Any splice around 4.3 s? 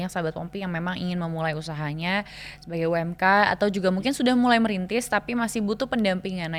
no; 0 cuts

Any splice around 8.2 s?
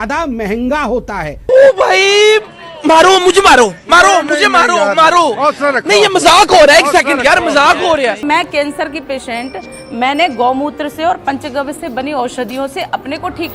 yes; 2 cuts; at 1.4 s, 8.2 s

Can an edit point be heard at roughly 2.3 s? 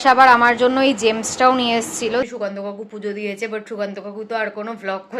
yes; 1 cut; at 2.3 s

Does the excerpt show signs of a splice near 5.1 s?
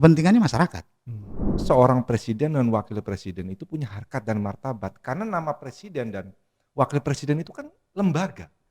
no; 1 cut; at 1.5 s

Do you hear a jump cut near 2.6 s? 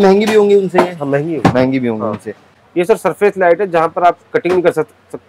yes; 1 cut; at 2.6 s

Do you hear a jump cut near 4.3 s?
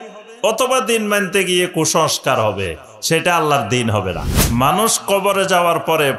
yes; 1 cut; at 4.3 s

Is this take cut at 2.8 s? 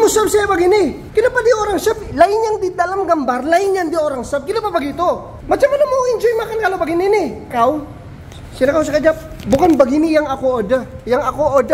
no; 4 cuts; at 1.0 s, 5.3 s, 7.5 s, 9.4 s

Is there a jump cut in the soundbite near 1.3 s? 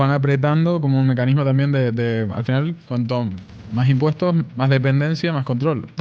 no; 2 cuts; at 2.8 s, 4.5 s

